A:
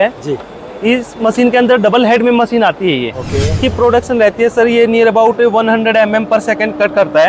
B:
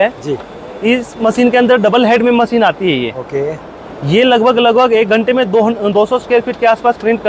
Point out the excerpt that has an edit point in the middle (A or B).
A